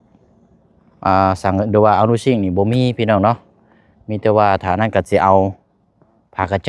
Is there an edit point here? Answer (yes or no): no